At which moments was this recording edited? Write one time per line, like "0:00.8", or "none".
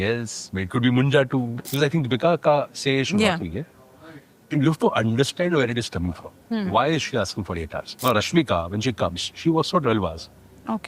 0:01.6
0:07.8